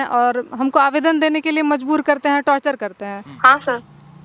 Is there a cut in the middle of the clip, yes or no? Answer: yes